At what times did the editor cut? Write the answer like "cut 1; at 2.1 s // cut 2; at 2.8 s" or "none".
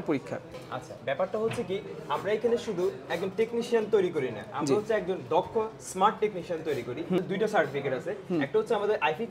cut 1; at 7.2 s